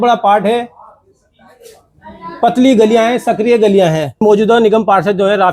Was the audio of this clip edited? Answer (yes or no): yes